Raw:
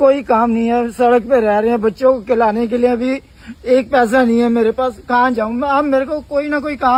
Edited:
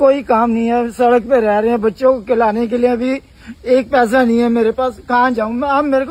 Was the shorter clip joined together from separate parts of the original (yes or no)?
no